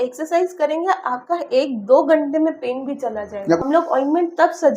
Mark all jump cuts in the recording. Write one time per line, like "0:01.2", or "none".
0:03.6